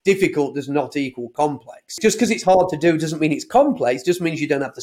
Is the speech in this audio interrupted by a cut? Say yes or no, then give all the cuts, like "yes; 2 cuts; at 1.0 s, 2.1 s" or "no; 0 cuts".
yes; 1 cut; at 2.0 s